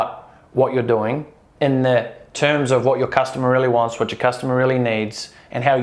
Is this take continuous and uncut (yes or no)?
yes